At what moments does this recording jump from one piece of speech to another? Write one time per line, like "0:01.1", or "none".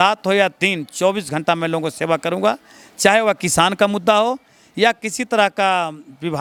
none